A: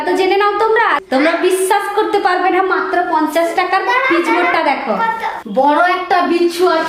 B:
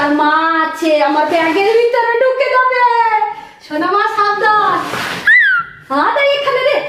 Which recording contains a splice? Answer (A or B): A